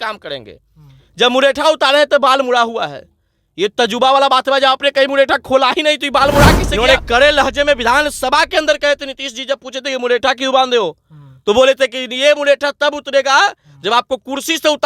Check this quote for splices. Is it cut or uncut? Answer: cut